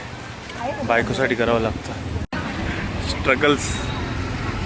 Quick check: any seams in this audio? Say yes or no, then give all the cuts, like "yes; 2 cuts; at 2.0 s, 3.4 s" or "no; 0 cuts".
yes; 1 cut; at 2.2 s